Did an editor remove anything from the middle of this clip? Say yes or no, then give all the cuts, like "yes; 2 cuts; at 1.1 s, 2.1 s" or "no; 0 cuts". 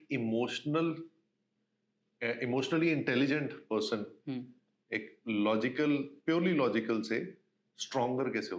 no; 0 cuts